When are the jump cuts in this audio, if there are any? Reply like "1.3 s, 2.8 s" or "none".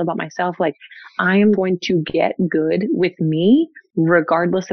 3.8 s